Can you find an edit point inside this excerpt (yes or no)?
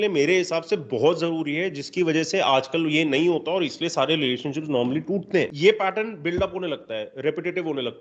yes